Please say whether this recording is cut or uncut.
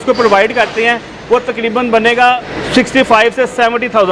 cut